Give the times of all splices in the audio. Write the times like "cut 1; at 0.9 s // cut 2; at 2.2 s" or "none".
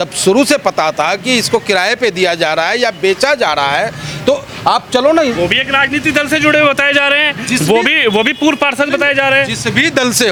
none